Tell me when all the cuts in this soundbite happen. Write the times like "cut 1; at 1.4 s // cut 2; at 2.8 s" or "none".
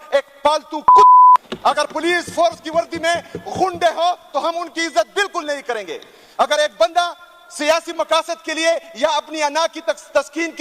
cut 1; at 1.4 s

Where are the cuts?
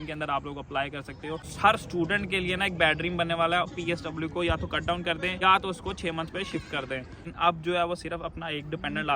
cut 1; at 1.5 s // cut 2; at 3.7 s // cut 3; at 5.4 s // cut 4; at 7.2 s

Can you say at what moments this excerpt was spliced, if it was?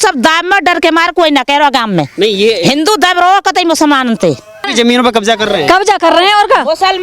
cut 1; at 4.7 s

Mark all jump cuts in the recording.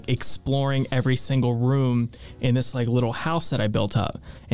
none

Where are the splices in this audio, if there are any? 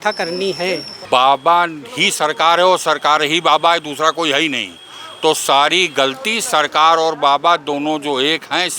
cut 1; at 0.9 s

